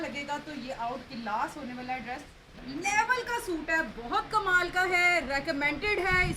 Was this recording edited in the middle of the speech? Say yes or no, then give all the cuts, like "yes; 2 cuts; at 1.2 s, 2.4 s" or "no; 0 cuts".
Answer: yes; 1 cut; at 2.5 s